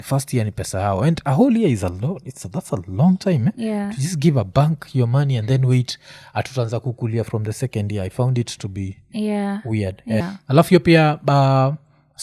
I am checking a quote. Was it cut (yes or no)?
yes